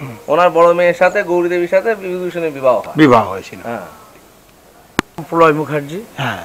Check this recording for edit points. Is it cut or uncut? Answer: cut